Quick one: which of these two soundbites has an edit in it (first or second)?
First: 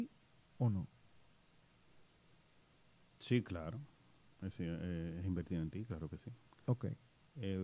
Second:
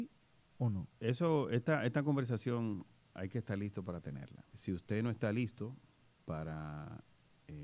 second